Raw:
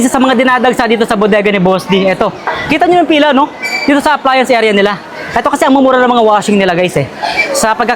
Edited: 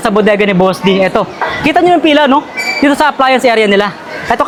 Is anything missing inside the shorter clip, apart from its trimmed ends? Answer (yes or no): no